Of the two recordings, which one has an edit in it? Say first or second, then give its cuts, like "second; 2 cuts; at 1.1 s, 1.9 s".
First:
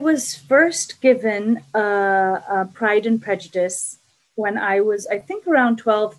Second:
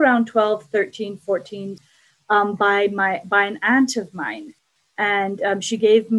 second; 2 cuts; at 1.8 s, 4.5 s